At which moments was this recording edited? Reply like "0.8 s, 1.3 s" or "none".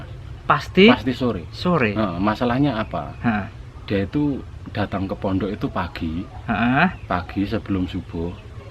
none